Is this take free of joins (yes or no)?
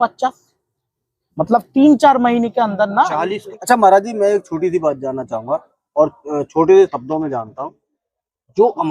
no